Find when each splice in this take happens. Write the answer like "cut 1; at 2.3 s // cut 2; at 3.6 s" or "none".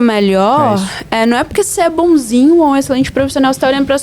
none